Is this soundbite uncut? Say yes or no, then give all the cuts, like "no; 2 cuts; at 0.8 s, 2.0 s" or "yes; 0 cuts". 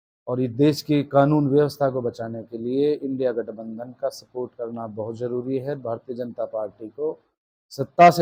yes; 0 cuts